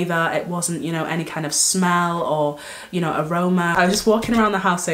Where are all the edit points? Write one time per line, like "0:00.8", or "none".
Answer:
0:03.7